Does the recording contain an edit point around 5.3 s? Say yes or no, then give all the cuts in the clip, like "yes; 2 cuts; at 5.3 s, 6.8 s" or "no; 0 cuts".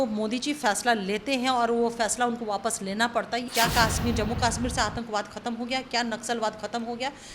no; 1 cut; at 3.5 s